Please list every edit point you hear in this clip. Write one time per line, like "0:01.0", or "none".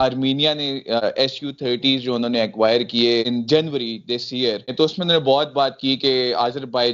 0:01.0
0:03.3
0:04.7